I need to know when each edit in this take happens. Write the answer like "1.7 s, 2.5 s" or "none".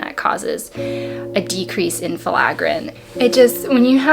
2.9 s